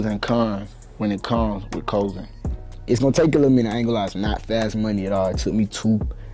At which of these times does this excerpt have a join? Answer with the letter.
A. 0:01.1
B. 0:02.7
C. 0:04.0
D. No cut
B